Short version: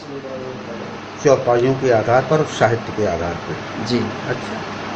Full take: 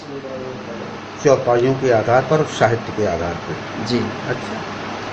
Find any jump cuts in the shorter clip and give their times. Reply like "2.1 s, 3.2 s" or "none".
none

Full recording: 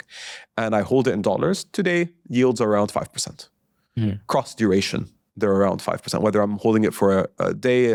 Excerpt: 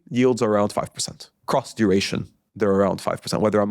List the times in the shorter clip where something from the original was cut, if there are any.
1.4 s

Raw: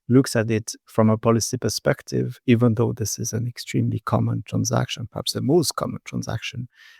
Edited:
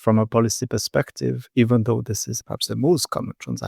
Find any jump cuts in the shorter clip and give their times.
2.3 s

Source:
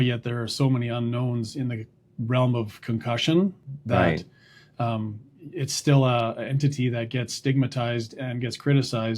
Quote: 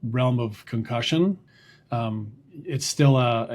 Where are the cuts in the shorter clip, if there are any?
1.5 s

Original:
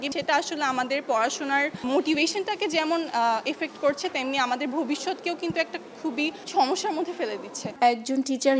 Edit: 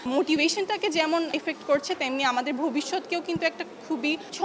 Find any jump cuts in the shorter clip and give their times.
1.3 s

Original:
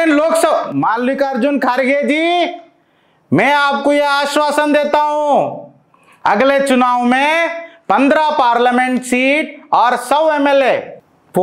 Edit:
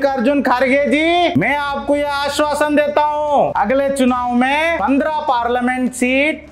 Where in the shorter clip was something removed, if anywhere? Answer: 1.3 s, 3.5 s, 4.8 s

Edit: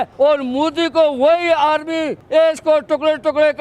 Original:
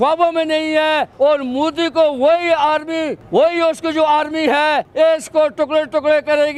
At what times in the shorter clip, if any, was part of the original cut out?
2.4 s

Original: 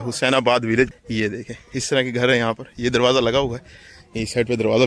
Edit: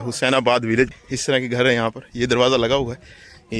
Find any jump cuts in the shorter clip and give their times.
1.0 s

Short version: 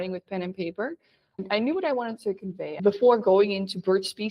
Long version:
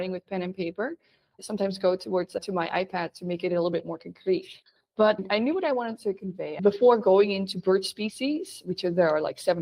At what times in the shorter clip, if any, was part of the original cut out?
1.4 s

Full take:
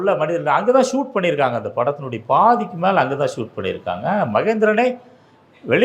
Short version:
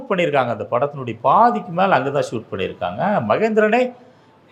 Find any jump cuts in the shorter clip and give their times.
none

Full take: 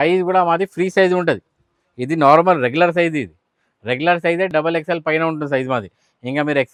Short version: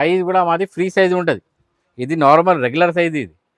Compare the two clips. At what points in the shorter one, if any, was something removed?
none

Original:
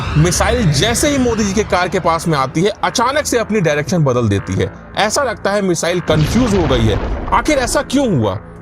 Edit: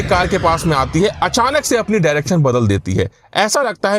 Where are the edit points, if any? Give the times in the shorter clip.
none

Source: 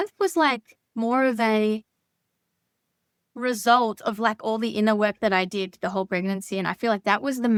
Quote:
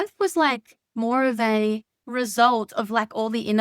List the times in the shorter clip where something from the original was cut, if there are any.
2.0 s

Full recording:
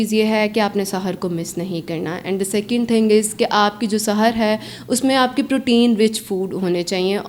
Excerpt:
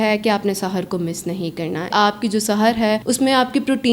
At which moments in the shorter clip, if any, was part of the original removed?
1.9 s, 3.0 s

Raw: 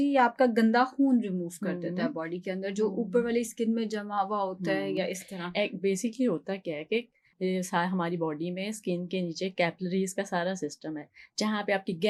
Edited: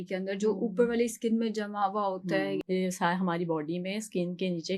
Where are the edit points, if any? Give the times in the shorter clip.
2.6 s

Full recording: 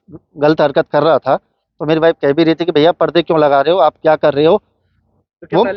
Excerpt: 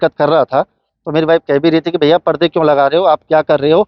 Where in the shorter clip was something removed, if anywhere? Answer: none

